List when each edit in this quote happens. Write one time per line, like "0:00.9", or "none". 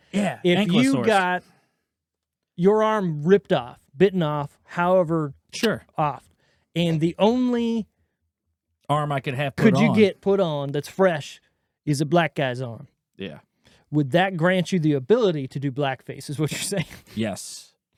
none